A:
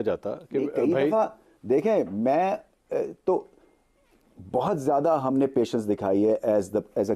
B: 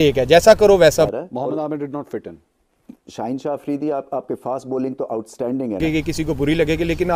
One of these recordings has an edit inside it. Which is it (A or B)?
B